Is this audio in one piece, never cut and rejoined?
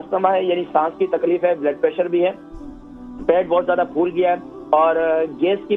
yes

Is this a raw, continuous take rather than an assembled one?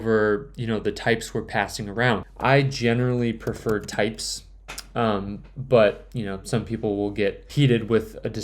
no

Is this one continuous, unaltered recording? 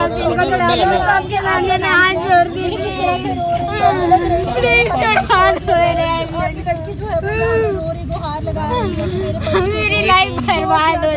yes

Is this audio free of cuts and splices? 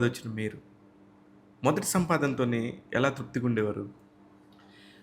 yes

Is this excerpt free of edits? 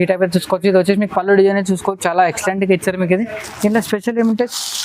yes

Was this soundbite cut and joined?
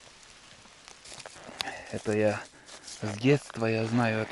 yes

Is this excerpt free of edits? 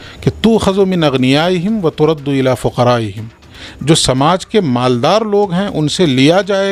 yes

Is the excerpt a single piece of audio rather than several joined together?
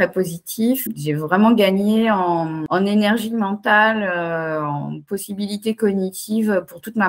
no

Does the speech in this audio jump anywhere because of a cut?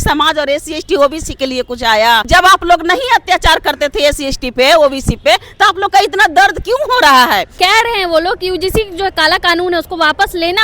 yes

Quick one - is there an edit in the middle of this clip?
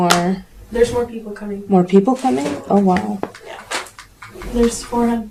no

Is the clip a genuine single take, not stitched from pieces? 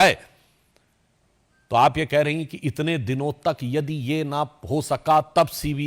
yes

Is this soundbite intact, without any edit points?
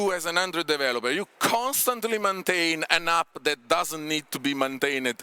yes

